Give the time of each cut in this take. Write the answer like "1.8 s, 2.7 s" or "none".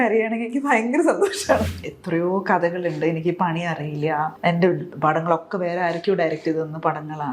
1.7 s, 4.3 s